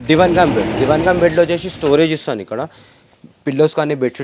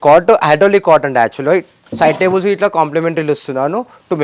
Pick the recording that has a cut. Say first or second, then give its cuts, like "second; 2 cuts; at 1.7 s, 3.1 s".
second; 1 cut; at 1.8 s